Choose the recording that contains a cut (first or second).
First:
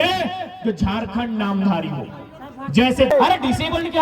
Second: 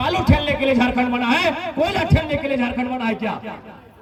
first